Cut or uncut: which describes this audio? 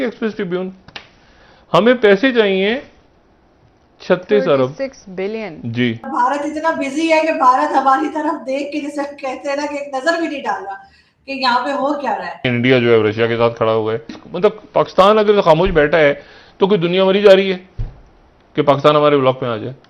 cut